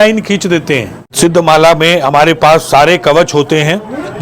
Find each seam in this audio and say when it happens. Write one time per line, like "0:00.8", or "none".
0:01.0